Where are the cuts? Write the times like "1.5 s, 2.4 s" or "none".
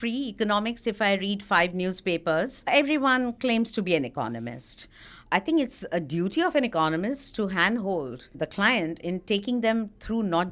2.7 s, 5.2 s, 8.4 s